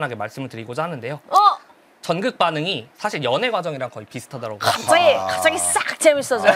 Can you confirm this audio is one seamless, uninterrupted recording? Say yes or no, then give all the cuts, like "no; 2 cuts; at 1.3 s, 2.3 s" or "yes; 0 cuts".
yes; 0 cuts